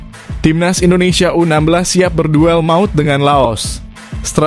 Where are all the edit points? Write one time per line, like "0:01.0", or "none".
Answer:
none